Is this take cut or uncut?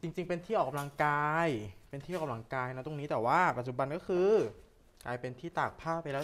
uncut